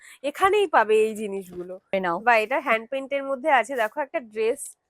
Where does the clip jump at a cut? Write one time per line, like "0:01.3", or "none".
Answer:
0:01.9